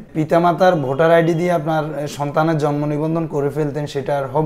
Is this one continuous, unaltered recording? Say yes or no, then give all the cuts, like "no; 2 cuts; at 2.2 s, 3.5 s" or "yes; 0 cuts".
yes; 0 cuts